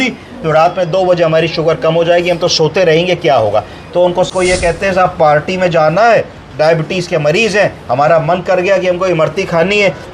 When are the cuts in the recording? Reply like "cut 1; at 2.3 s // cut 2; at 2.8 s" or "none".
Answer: cut 1; at 4.3 s

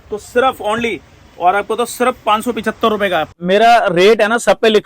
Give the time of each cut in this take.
cut 1; at 3.3 s

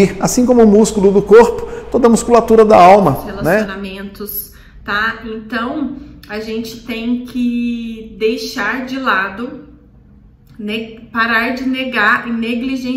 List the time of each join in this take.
cut 1; at 3.7 s

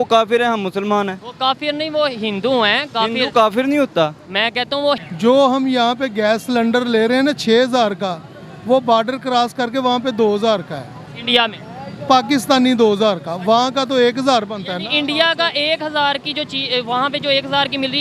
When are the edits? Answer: cut 1; at 5.1 s

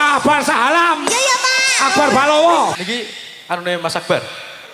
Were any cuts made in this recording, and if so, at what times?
cut 1; at 2.7 s

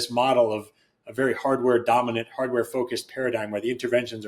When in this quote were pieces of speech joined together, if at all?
none

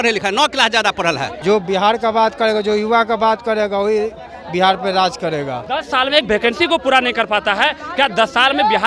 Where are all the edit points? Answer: cut 1; at 1.3 s // cut 2; at 5.6 s

